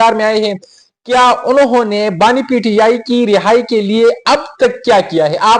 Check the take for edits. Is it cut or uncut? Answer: uncut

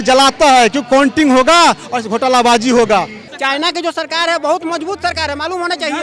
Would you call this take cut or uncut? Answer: cut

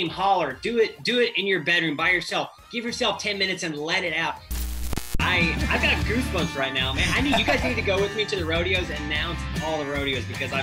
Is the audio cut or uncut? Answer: cut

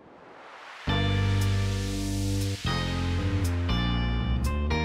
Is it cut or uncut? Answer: uncut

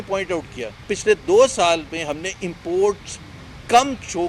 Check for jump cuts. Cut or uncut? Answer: cut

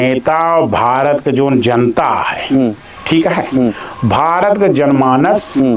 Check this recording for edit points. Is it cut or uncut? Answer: uncut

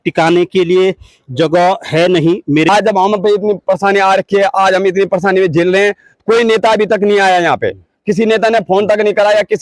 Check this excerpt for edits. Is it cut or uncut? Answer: cut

